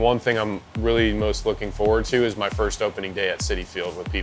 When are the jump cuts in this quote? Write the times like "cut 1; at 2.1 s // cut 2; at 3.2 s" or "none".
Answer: none